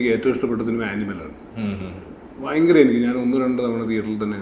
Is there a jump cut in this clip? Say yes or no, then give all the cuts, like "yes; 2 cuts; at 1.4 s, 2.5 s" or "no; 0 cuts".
no; 0 cuts